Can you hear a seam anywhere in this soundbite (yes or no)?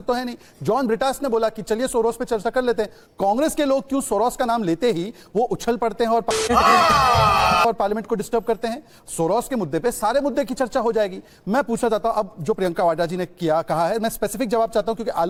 no